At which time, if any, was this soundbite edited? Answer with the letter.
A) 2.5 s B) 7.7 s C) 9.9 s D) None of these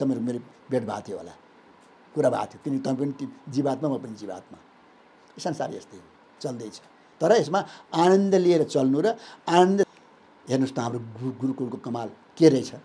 C